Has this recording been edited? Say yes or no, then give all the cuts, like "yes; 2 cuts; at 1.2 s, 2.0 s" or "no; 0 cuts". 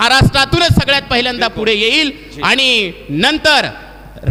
no; 0 cuts